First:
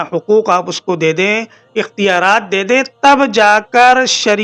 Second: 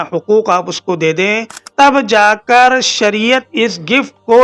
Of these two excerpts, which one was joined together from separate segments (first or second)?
second